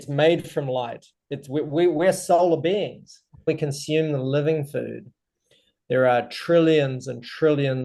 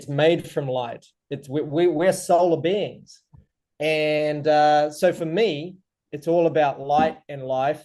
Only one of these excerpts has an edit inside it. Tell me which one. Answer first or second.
first